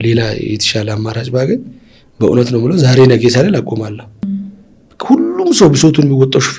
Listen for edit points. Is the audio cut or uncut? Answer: cut